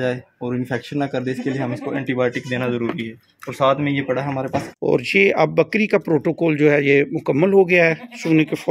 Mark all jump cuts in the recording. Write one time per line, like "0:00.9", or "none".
0:04.7